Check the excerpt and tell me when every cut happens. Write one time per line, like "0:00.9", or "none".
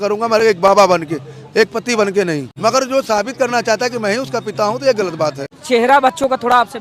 0:02.5
0:05.6